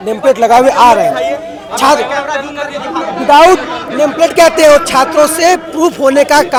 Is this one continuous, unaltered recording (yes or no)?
yes